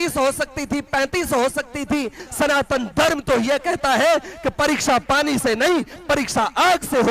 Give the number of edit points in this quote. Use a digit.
1